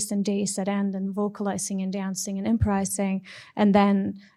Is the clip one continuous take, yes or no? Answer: yes